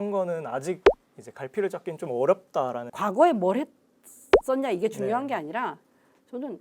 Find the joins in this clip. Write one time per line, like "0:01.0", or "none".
0:02.9